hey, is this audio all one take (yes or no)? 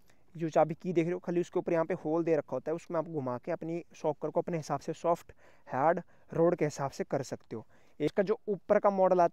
no